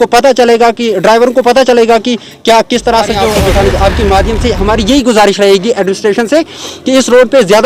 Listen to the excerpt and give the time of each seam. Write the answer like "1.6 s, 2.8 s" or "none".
3.4 s